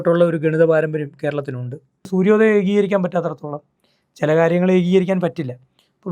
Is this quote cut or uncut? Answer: cut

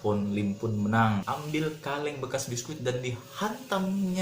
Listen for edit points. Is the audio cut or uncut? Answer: cut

